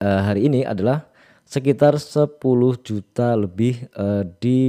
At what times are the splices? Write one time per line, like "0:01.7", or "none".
none